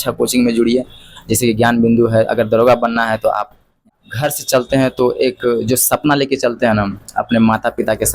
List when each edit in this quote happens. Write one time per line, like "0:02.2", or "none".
0:03.9

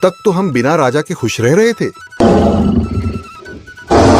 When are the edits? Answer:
0:02.0

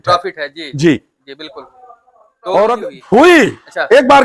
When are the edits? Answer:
0:02.9

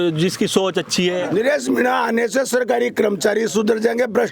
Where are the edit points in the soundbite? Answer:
0:01.3

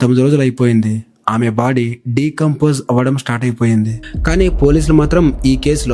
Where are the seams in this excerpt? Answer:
0:04.0

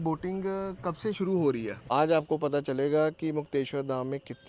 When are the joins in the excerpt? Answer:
0:01.8

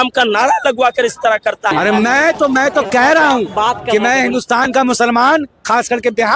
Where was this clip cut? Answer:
0:01.7

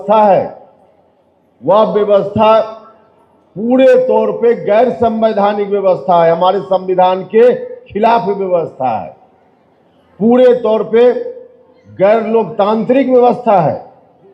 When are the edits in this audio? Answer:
none

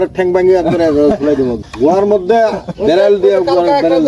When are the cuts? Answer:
none

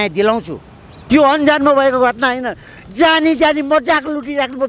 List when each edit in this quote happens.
0:01.0

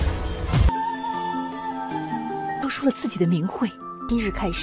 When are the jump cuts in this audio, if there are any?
none

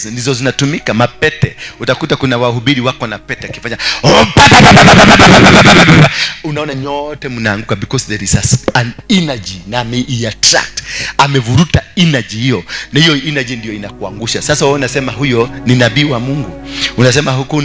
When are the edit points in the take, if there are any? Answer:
none

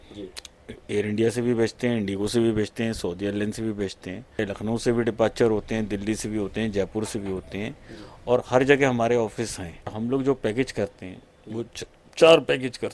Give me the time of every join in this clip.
0:04.4
0:09.9

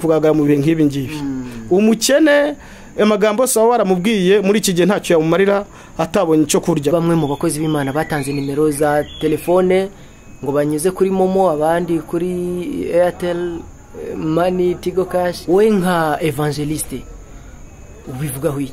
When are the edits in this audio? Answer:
0:06.9
0:15.4

